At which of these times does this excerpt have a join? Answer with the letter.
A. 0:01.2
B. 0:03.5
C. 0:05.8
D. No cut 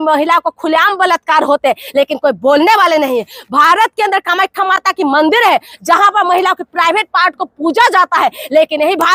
D